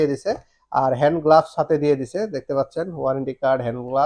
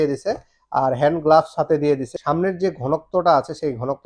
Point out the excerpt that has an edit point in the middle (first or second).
second